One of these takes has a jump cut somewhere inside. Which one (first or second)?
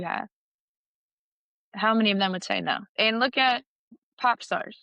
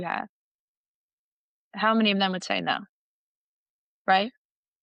first